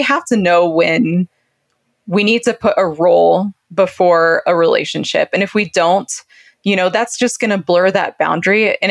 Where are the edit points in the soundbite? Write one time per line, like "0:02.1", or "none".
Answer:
none